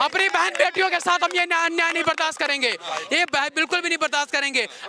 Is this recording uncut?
yes; 0 cuts

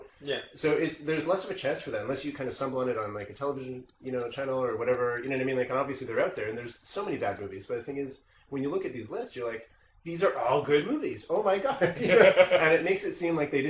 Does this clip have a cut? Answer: no; 0 cuts

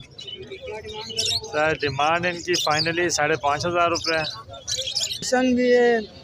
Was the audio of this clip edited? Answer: yes; 1 cut; at 5.3 s

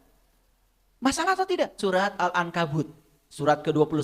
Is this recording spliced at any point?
yes; 1 cut; at 1.8 s

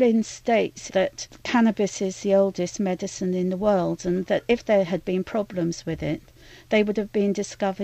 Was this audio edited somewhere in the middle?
yes; 1 cut; at 1.1 s

